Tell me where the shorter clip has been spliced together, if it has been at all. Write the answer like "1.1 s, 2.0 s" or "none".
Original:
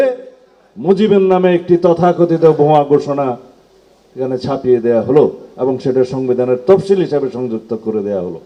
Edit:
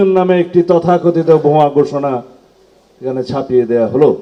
none